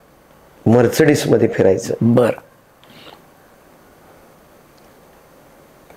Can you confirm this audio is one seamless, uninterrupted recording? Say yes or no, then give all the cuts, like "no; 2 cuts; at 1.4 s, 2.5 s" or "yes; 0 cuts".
yes; 0 cuts